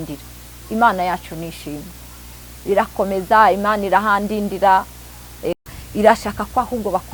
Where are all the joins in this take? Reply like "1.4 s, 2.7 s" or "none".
5.6 s